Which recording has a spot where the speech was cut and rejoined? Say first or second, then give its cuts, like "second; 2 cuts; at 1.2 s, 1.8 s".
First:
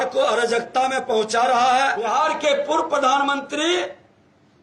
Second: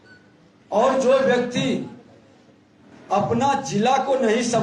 first; 1 cut; at 2.0 s